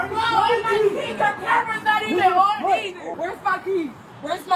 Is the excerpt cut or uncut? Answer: cut